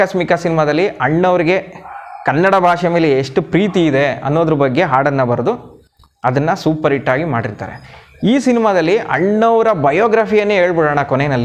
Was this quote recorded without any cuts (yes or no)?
yes